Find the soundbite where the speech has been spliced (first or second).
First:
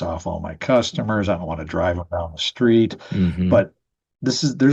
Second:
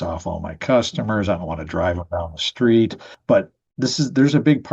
second